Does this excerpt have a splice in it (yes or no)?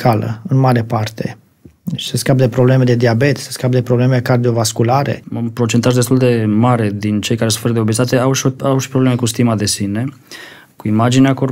yes